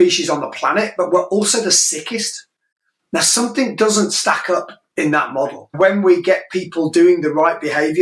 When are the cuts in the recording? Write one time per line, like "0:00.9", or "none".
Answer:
0:05.7